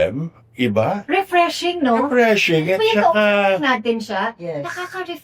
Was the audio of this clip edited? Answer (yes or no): no